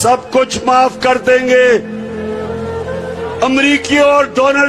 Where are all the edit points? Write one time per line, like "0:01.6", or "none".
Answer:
0:01.9
0:03.4